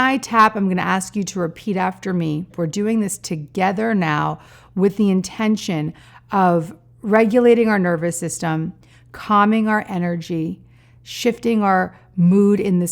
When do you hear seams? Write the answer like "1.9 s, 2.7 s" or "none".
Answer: 2.5 s